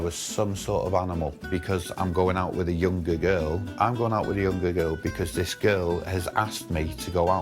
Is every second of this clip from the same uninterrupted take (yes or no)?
no